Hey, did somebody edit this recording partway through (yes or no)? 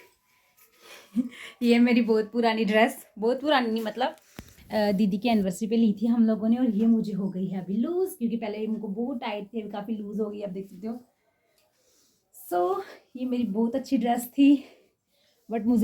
no